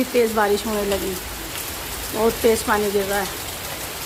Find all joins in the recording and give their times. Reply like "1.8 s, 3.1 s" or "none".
none